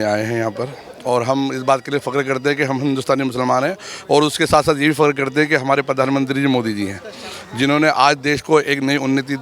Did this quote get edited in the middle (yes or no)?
no